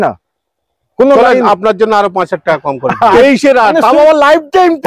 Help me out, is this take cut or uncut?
cut